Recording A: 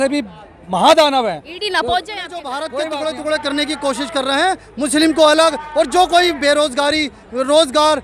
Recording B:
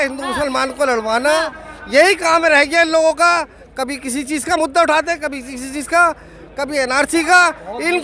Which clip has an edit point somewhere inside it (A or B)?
A